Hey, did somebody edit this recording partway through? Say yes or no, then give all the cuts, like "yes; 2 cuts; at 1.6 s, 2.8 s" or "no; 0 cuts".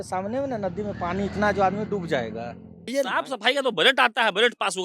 yes; 1 cut; at 2.9 s